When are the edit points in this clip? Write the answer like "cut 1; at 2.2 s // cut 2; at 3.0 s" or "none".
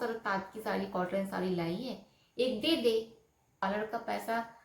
cut 1; at 3.6 s